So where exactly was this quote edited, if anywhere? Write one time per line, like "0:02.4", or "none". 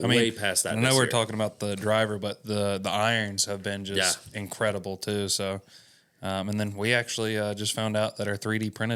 none